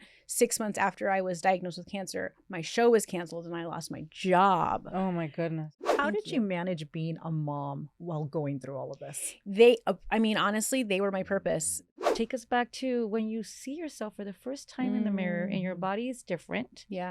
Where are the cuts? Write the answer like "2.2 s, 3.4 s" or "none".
5.7 s, 12.0 s